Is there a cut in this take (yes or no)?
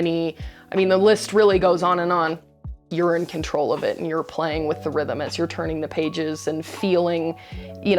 yes